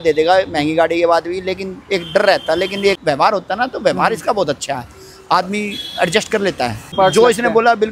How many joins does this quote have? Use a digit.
2